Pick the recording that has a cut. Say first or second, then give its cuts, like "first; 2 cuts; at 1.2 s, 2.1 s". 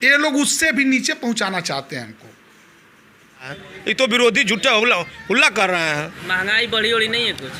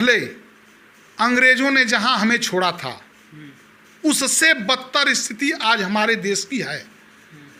first; 2 cuts; at 3.6 s, 6.2 s